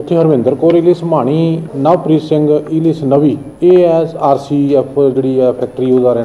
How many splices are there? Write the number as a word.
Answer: two